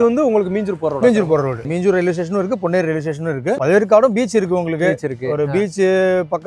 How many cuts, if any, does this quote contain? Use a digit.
2